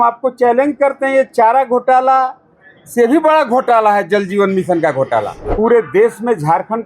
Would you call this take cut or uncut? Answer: cut